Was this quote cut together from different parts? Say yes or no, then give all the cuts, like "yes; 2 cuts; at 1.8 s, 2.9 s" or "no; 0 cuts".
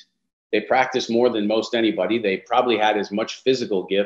no; 0 cuts